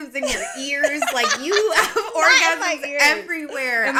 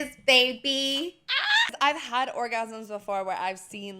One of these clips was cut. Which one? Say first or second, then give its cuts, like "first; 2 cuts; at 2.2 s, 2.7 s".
second; 1 cut; at 1.7 s